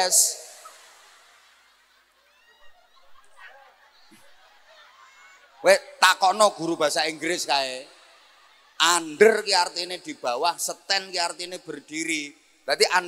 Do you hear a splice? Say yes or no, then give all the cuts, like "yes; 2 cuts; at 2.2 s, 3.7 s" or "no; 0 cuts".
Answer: no; 0 cuts